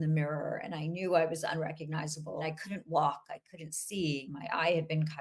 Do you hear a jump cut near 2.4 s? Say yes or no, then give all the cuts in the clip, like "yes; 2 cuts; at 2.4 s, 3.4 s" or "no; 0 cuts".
yes; 2 cuts; at 2.4 s, 4.3 s